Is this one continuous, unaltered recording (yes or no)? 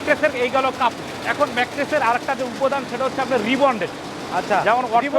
yes